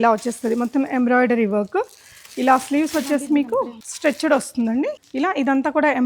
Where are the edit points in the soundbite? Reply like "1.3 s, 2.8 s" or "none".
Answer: 3.8 s, 5.0 s